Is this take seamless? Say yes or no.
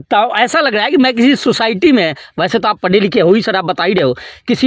yes